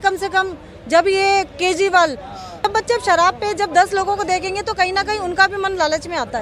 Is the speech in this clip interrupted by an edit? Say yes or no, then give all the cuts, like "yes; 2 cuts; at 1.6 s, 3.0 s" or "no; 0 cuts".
yes; 1 cut; at 2.6 s